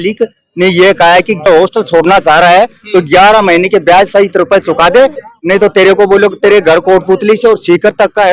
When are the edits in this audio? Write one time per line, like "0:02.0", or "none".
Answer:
none